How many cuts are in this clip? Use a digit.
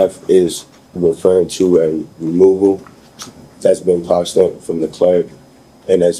0